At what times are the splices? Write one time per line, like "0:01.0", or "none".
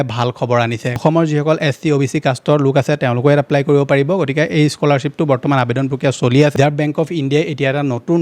0:00.9
0:06.5